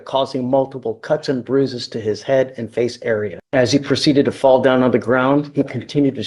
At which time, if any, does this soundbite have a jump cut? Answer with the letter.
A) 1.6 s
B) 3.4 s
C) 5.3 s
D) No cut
B